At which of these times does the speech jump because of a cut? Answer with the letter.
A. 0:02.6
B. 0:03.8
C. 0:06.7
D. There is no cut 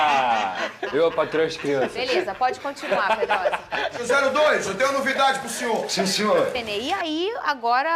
C